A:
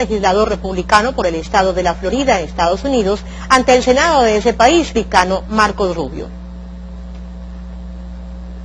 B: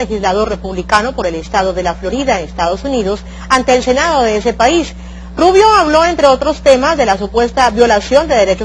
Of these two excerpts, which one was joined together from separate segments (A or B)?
B